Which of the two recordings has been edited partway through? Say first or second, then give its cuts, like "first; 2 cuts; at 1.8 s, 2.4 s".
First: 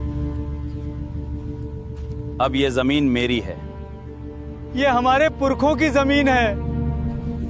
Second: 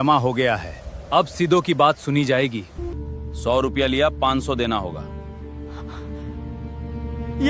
second; 1 cut; at 2.9 s